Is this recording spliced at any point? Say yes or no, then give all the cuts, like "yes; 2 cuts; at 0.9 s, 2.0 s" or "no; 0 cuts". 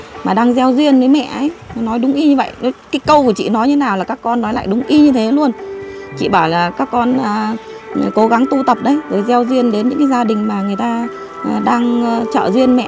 no; 0 cuts